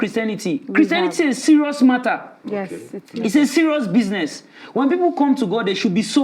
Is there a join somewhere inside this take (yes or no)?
no